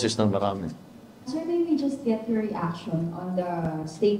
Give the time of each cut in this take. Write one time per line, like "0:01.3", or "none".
0:01.3